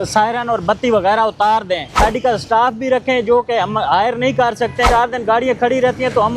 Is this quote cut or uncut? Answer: cut